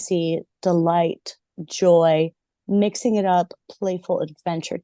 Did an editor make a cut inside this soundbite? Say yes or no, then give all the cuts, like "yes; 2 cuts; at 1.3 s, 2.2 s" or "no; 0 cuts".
no; 0 cuts